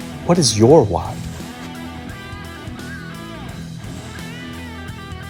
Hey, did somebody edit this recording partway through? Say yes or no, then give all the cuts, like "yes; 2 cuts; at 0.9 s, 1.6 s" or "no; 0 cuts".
no; 0 cuts